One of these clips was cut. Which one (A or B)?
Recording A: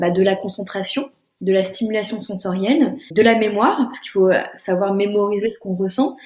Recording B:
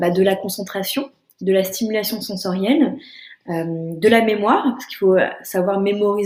A